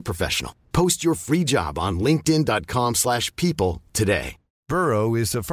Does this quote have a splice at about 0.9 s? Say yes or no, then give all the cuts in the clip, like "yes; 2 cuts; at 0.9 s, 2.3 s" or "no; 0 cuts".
no; 1 cut; at 4.5 s